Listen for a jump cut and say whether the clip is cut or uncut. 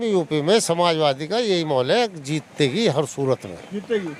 uncut